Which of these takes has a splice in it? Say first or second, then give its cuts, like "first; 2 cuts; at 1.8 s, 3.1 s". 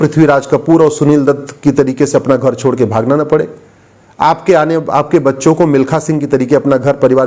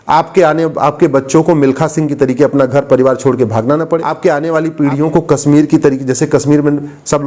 second; 1 cut; at 4.1 s